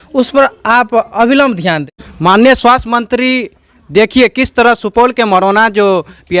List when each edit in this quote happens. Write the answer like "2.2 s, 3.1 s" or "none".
1.9 s